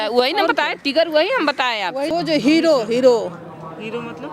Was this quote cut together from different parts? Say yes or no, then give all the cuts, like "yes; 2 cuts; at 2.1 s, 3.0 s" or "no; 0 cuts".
yes; 1 cut; at 2.1 s